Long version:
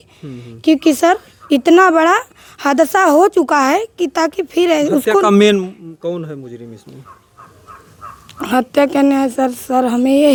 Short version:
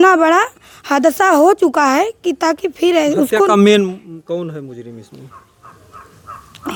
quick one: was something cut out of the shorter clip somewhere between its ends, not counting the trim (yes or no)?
no